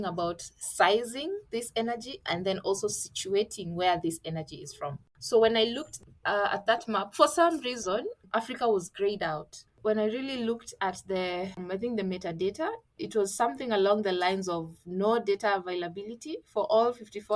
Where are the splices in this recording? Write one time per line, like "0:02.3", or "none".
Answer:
0:05.1
0:08.2
0:09.8
0:11.6
0:13.0

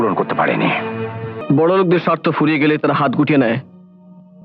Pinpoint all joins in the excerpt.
0:01.3

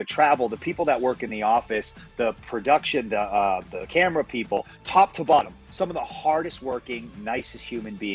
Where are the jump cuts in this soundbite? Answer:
0:04.8

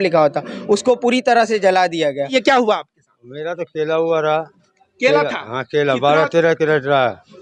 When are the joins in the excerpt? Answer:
0:02.3

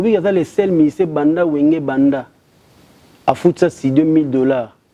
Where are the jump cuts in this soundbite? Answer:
none

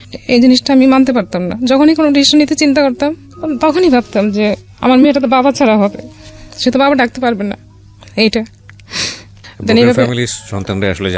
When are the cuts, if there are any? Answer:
none

